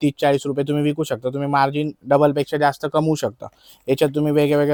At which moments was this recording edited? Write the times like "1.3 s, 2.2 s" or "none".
none